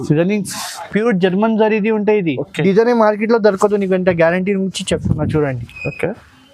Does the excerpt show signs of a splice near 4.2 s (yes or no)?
no